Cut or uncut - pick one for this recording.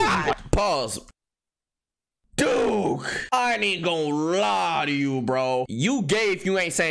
cut